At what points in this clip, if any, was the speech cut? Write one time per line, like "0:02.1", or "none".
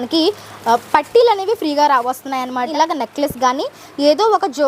0:02.7